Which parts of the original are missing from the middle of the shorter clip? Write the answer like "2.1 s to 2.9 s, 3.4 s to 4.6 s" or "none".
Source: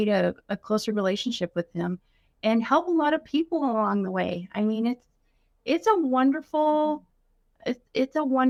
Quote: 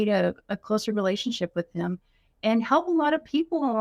none

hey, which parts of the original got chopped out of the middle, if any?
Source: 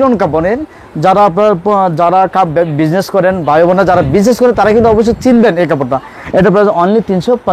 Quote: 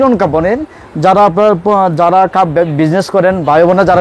none

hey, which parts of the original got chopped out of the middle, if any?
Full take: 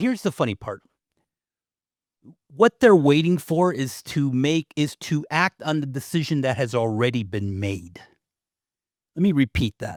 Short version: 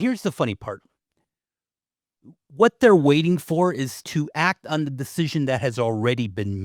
4.0 s to 5.0 s

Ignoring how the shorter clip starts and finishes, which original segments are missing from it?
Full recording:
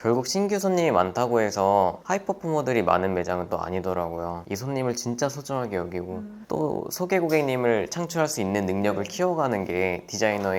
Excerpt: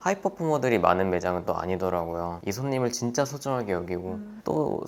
none

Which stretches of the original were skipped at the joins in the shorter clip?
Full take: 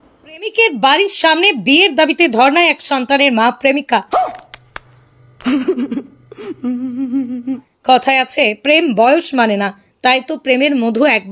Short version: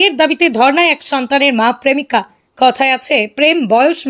4.1 s to 7.6 s

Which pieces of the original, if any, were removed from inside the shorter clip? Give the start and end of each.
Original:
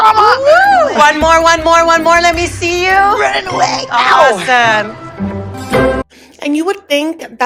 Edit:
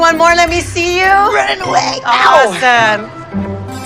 none

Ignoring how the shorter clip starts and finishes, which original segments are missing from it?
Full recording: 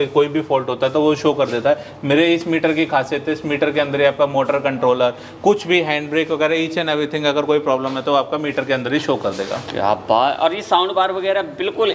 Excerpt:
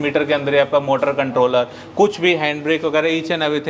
none

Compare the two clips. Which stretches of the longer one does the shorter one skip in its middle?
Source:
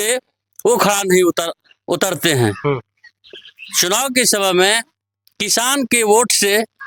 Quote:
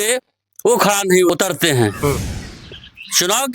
1.3 s to 1.9 s

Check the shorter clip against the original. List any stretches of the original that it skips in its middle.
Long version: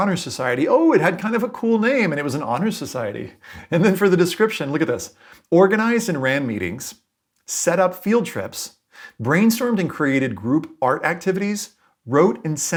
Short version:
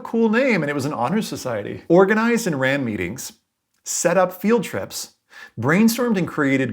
3.2 s to 5.3 s

